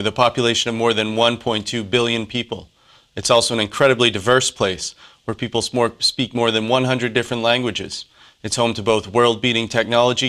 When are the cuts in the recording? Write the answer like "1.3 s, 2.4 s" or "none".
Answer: 1.6 s